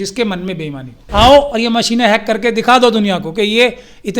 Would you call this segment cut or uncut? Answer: cut